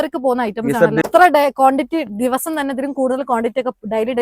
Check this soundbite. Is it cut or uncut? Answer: cut